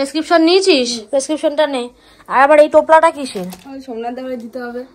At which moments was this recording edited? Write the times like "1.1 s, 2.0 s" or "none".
none